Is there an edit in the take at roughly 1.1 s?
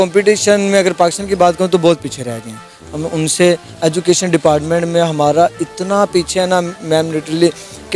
no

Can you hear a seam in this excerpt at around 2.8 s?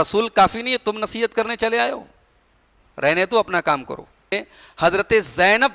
no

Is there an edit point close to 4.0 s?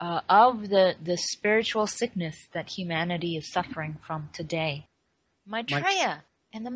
no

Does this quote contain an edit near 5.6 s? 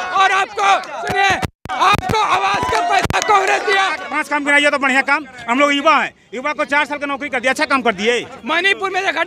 no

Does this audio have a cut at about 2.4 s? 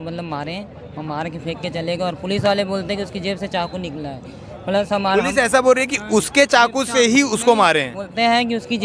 no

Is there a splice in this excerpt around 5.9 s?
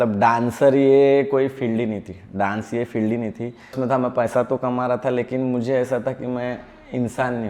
no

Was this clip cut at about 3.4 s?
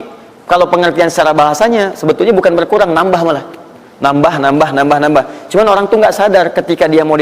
no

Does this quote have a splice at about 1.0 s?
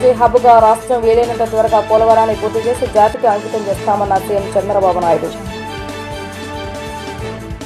no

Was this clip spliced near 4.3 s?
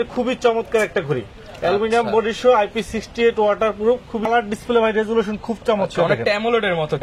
yes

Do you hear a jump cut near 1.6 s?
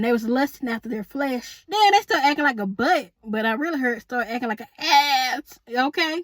yes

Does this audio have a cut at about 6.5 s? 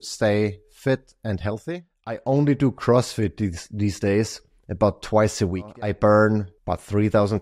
yes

